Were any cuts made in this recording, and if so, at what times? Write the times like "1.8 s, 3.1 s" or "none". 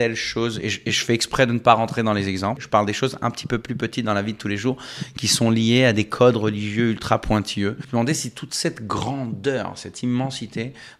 2.6 s, 7.8 s